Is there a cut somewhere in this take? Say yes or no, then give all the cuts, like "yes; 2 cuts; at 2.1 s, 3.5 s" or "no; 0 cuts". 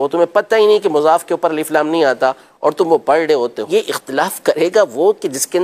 yes; 1 cut; at 3.6 s